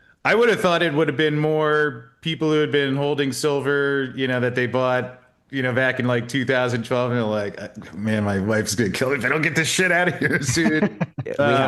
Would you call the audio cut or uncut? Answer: uncut